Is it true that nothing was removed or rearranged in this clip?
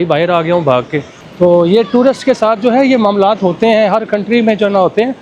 no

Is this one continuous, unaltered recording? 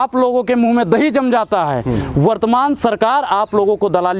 yes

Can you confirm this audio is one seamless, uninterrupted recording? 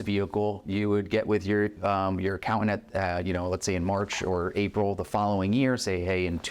yes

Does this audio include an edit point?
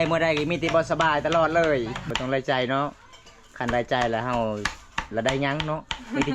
yes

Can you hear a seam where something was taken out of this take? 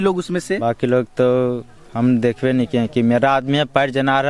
no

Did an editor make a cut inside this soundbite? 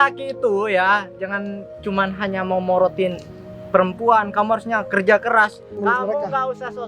yes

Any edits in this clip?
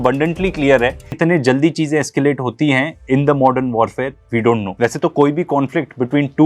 yes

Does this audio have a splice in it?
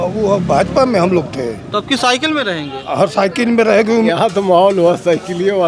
yes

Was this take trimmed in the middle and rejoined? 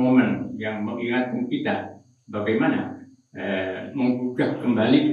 no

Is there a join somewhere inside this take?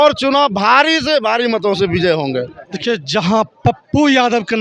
yes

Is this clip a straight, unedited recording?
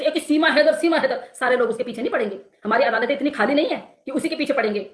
yes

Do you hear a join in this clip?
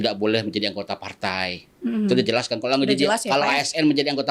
no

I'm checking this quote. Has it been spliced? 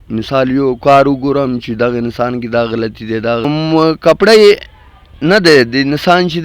yes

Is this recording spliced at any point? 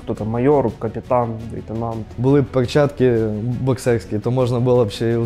yes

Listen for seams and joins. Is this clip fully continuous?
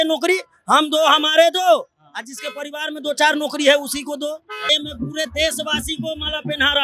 no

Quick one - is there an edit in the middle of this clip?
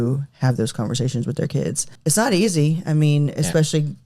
yes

